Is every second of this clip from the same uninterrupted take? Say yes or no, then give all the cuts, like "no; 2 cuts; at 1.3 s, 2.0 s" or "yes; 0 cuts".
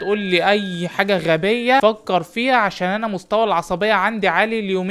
no; 1 cut; at 1.8 s